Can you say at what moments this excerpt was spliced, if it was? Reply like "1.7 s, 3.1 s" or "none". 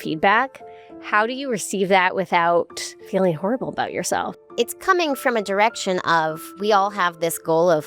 3.1 s, 4.3 s